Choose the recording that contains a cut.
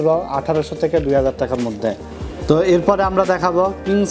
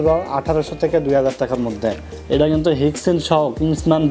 second; 1 cut; at 2.1 s

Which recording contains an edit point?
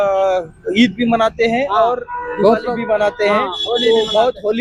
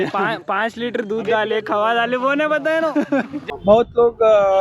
second; 1 cut; at 3.4 s

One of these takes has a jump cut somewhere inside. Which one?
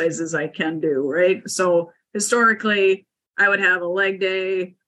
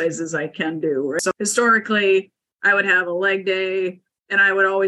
second; 1 cut; at 1.2 s

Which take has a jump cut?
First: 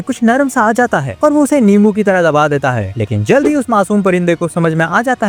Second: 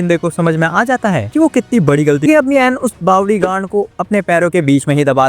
second; 1 cut; at 2.2 s

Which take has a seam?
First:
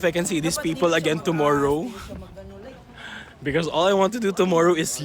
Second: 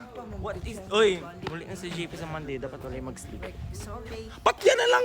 second; 1 cut; at 4.1 s

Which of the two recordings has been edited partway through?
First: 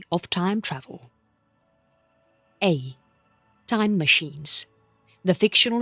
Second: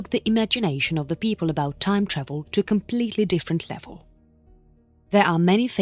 second; 1 cut; at 1.6 s

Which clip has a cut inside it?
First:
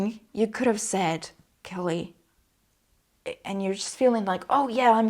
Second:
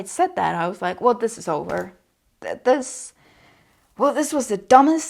first; 1 cut; at 3.1 s

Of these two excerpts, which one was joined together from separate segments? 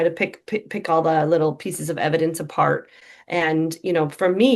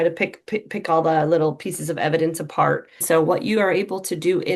second; 1 cut; at 3.0 s

